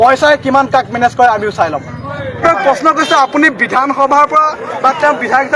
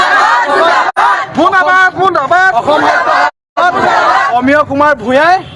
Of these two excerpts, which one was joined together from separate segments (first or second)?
first